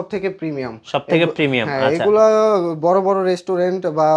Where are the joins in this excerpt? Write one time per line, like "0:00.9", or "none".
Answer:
none